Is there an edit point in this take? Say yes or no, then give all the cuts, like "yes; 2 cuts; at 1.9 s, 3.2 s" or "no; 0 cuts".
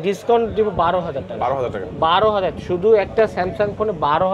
no; 0 cuts